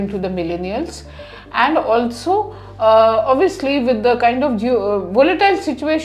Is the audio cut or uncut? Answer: uncut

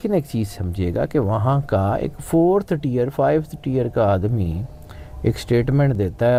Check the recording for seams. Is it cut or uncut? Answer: uncut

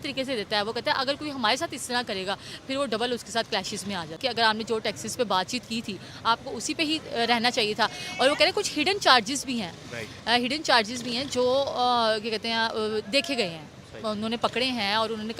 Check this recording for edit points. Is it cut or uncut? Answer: cut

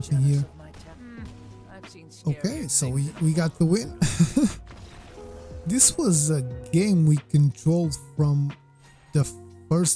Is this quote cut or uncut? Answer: uncut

